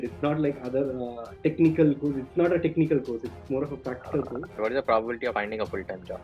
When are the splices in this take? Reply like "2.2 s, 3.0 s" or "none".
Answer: 4.6 s, 5.3 s